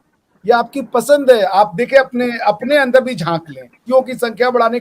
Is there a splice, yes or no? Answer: yes